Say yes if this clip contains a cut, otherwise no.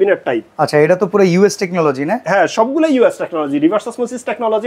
no